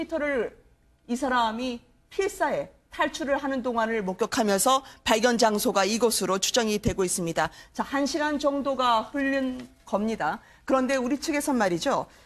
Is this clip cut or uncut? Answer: cut